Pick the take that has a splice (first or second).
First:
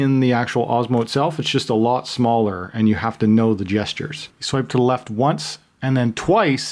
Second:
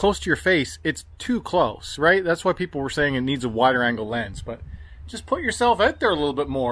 first